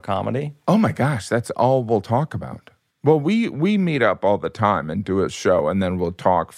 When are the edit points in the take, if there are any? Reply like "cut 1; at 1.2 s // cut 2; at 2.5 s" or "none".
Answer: none